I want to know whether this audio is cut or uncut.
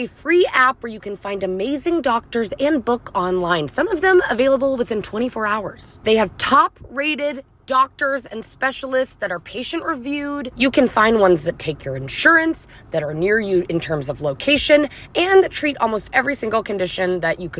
uncut